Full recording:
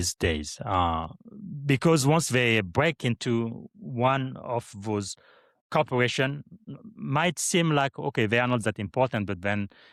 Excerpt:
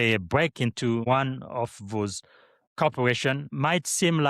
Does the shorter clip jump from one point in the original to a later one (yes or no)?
yes